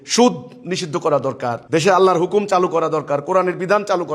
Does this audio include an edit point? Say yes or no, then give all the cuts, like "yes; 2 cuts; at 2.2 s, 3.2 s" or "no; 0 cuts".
yes; 1 cut; at 1.6 s